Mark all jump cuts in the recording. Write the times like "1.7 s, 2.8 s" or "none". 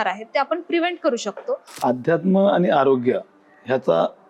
1.7 s